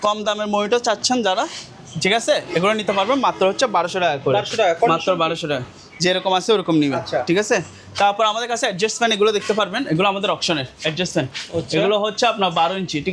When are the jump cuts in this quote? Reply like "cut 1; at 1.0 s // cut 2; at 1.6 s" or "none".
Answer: none

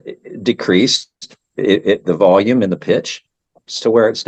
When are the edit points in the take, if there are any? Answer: none

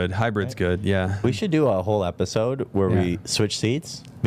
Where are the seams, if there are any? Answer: cut 1; at 1.2 s

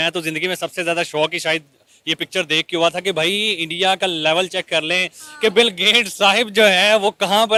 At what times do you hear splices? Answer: none

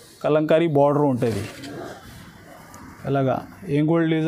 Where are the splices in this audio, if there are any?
cut 1; at 1.8 s

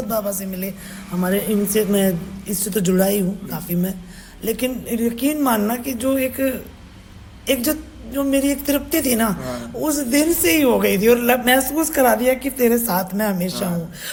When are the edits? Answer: none

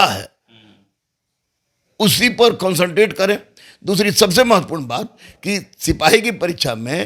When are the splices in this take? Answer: none

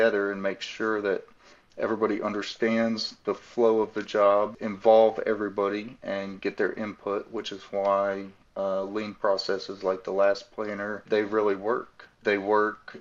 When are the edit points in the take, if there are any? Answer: cut 1; at 4.6 s // cut 2; at 11.0 s // cut 3; at 12.2 s

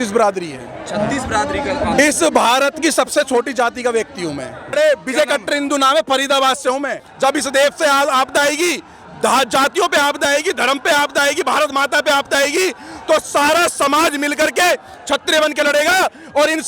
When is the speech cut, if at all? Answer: cut 1; at 4.7 s // cut 2; at 7.0 s

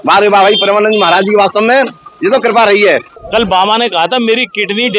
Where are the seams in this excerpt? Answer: cut 1; at 3.2 s

